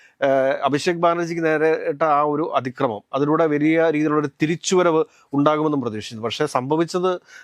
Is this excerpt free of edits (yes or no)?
yes